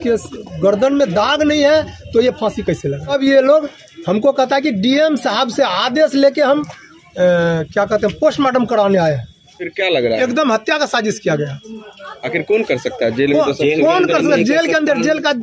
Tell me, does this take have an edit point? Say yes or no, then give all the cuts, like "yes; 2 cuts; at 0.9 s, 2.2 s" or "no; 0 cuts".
yes; 2 cuts; at 3.1 s, 9.7 s